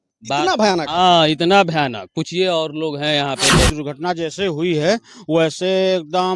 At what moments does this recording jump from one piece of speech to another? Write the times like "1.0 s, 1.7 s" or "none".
3.6 s